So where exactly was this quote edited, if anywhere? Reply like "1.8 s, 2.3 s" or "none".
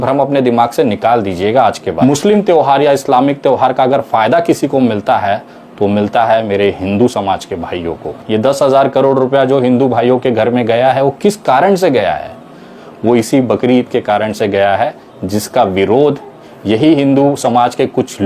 1.9 s, 8.2 s